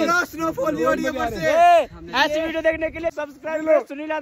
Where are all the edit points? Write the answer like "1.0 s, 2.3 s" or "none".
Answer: 3.2 s

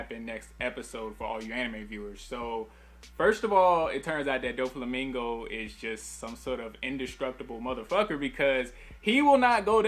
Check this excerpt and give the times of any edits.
8.1 s

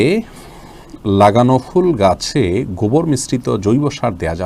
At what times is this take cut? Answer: none

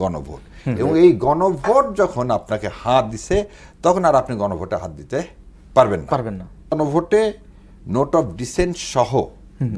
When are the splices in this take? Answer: 6.8 s

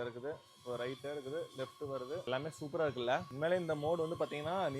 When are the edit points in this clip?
2.2 s, 3.3 s

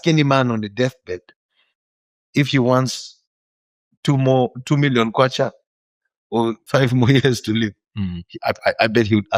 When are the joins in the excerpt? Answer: none

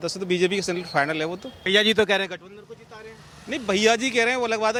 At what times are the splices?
none

